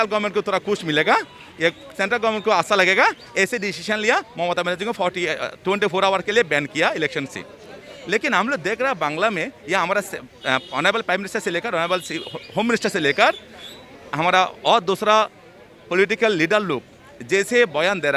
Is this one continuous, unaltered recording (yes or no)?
yes